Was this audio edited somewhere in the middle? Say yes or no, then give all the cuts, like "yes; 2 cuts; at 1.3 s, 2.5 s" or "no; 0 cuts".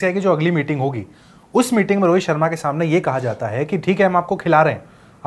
no; 0 cuts